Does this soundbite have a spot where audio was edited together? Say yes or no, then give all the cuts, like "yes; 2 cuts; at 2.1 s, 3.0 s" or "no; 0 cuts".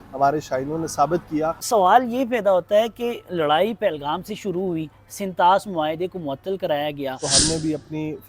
yes; 2 cuts; at 1.6 s, 7.3 s